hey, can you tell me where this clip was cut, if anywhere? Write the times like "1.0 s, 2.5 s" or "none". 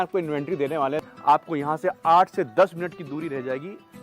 1.0 s